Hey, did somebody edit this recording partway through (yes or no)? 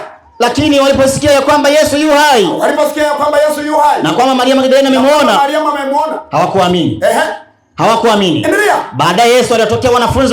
no